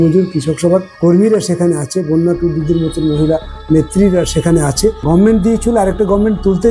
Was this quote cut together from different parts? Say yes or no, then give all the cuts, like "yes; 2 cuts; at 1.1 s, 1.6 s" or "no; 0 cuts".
yes; 2 cuts; at 0.9 s, 5.0 s